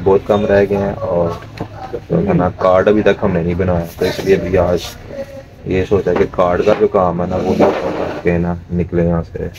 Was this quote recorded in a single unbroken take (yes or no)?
yes